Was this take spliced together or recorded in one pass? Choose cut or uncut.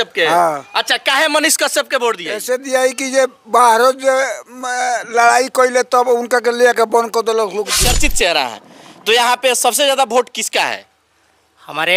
cut